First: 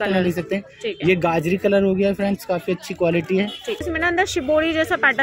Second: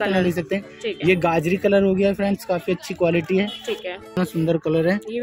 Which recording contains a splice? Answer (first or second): first